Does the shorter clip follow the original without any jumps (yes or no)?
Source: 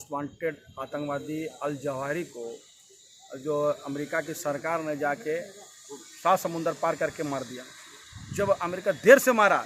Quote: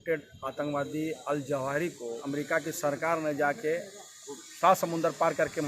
no